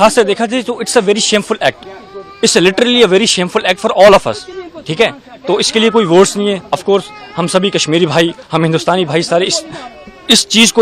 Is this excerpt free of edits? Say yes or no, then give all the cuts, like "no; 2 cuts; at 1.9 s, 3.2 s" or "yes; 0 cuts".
yes; 0 cuts